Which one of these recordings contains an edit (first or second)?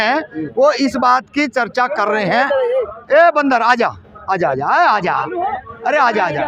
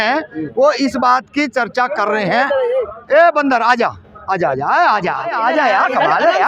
second